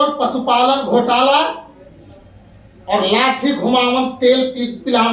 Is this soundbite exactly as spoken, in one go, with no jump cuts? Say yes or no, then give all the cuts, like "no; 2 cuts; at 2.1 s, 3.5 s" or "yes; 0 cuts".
yes; 0 cuts